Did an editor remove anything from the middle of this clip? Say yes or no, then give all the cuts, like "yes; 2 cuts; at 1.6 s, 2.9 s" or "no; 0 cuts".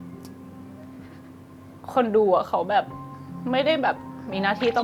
no; 0 cuts